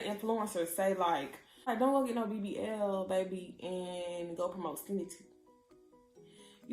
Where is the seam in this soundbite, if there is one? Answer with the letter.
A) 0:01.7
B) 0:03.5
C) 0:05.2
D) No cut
A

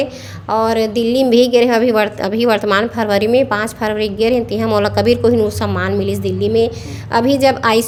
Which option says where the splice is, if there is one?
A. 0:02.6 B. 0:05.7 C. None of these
C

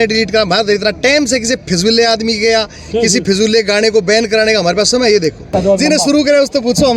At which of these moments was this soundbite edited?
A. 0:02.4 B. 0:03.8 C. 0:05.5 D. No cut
C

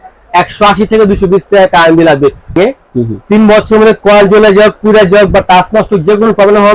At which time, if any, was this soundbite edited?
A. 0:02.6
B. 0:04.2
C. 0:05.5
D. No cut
A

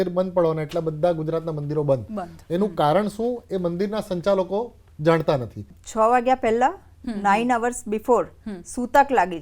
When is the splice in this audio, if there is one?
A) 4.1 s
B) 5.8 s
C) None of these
B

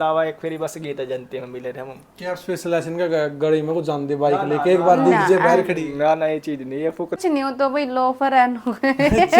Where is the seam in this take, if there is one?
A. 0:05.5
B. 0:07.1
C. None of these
B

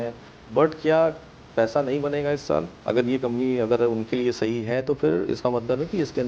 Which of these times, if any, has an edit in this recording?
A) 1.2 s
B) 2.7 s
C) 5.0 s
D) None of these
B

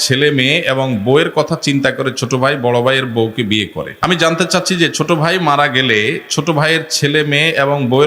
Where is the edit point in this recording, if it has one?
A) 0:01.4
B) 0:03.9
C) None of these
B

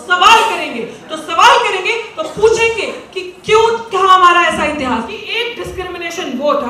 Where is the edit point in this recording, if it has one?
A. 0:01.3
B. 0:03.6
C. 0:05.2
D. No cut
C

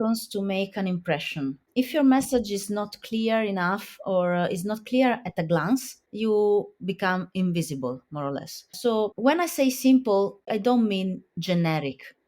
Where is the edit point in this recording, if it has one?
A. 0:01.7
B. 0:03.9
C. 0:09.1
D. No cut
A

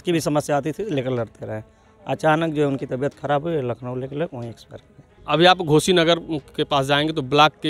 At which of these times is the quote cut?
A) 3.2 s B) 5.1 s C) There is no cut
B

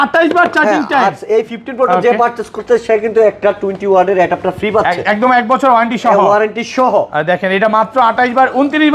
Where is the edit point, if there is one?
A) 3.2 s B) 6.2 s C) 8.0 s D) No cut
D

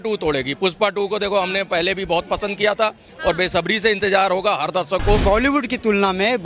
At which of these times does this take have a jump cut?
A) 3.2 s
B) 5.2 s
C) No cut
B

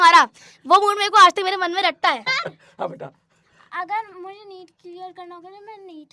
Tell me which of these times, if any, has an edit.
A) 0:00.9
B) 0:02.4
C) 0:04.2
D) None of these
B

